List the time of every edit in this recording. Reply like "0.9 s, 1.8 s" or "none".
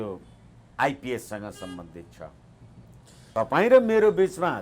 3.3 s